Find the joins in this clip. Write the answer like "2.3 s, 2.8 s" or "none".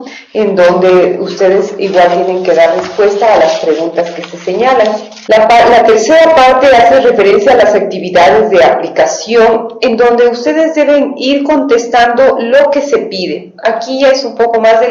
9.9 s